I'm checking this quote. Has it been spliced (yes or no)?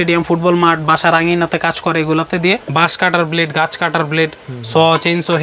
yes